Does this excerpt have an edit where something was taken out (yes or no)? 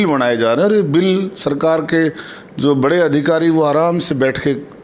no